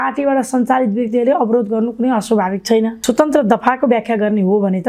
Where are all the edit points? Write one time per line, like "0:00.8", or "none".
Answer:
0:03.0